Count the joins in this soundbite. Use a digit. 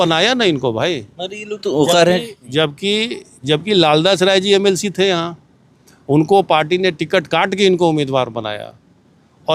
0